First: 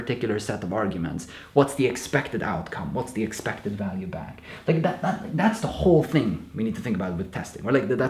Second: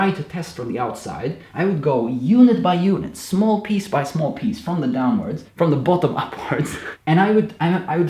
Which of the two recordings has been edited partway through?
second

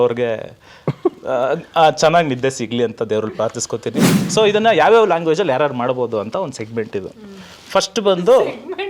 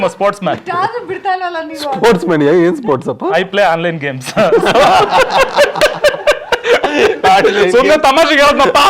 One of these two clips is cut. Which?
first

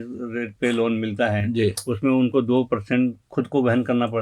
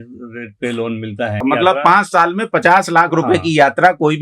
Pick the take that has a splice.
second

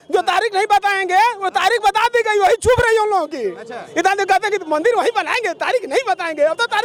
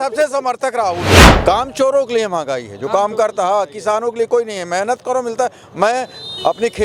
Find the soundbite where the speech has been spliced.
second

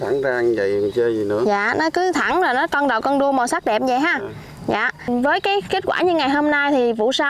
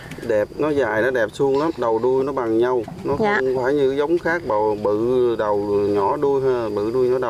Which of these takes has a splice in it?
first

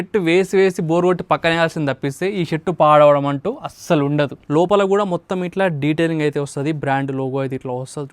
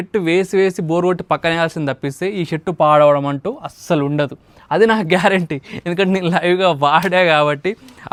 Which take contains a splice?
first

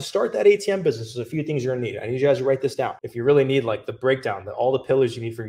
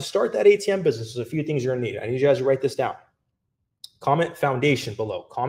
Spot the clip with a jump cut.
first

